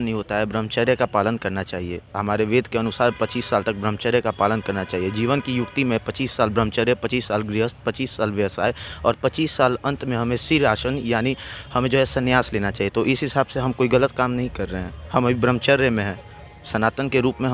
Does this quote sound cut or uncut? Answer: uncut